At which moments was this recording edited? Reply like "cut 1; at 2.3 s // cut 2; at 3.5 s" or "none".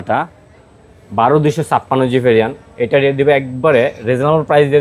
none